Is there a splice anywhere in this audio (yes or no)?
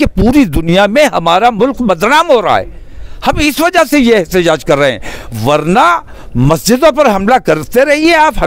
no